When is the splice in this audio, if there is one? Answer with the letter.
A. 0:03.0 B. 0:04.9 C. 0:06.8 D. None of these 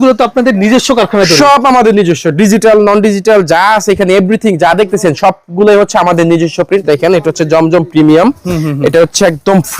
C